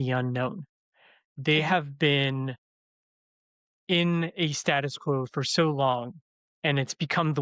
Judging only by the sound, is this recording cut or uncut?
uncut